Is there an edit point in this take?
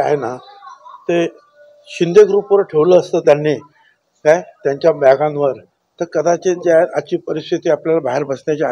no; 0 cuts

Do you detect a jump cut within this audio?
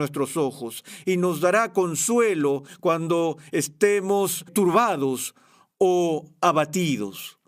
yes; 1 cut; at 4.5 s

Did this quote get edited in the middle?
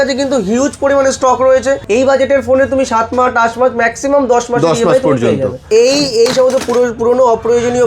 yes; 2 cuts; at 1.8 s, 5.6 s

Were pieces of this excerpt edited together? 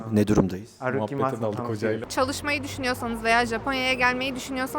yes; 1 cut; at 2.1 s

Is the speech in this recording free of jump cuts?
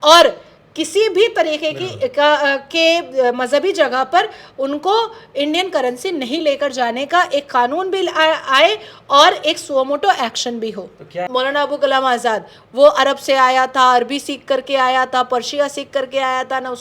no; 1 cut; at 11.3 s

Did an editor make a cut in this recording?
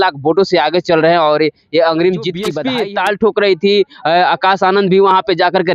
yes; 1 cut; at 2.6 s

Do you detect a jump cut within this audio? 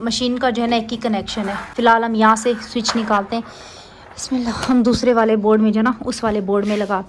no; 0 cuts

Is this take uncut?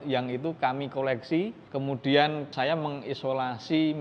no; 2 cuts; at 1.6 s, 2.5 s

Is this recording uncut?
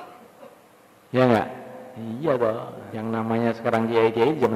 no; 1 cut; at 2.8 s

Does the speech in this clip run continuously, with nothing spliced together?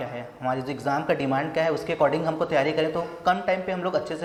yes; 0 cuts

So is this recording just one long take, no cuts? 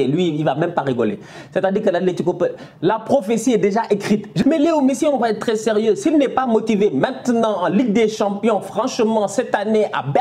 no; 1 cut; at 4.4 s

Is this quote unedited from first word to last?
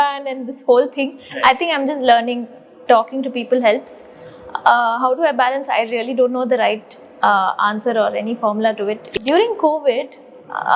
no; 1 cut; at 9.0 s

